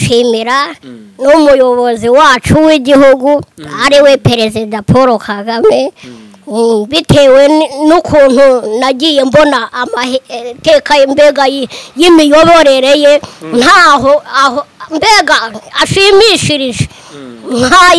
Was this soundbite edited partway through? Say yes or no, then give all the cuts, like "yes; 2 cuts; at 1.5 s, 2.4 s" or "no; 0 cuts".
no; 0 cuts